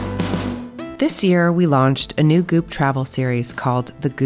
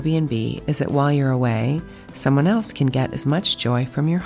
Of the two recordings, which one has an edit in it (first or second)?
first